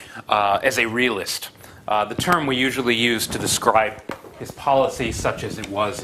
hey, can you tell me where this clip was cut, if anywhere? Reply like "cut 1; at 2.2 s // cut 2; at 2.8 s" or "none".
cut 1; at 3.6 s